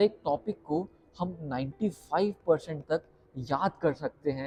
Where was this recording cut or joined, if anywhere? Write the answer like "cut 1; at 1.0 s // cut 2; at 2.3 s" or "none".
none